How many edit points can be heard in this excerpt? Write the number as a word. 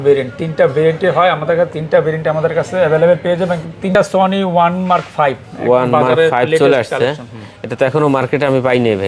one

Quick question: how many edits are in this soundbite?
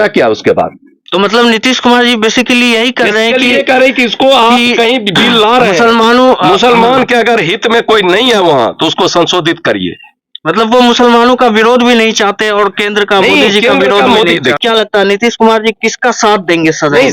one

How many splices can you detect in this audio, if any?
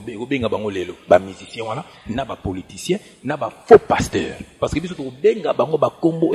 two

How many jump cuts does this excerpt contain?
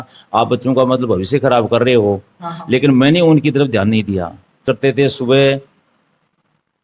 one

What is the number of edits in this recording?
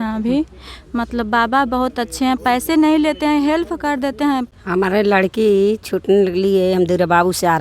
one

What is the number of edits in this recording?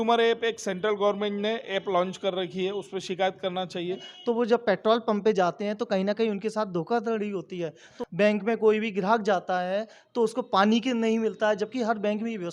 two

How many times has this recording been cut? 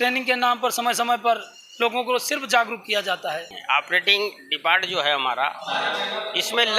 one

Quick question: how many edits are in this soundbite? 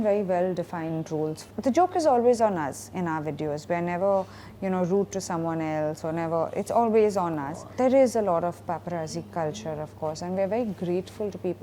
two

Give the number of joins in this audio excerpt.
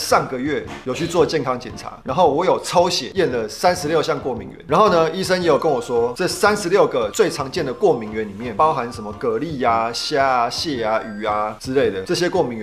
zero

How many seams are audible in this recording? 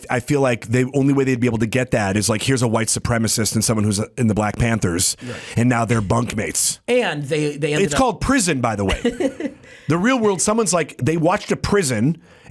zero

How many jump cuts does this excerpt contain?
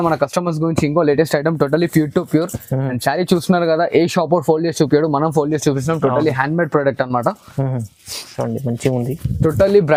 zero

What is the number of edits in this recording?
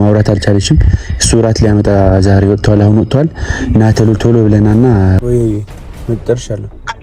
one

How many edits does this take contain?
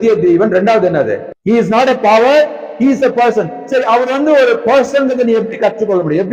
one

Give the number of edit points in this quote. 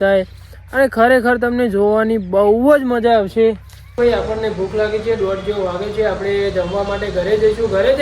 one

